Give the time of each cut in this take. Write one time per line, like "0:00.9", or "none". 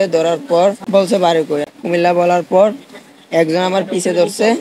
0:00.8
0:01.7